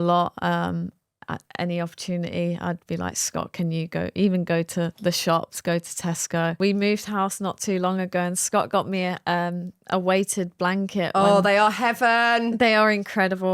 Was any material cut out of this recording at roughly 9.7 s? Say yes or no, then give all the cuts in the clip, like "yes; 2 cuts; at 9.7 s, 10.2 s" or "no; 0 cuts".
no; 1 cut; at 6.5 s